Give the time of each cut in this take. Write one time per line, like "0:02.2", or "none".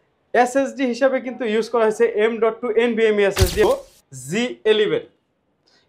0:03.6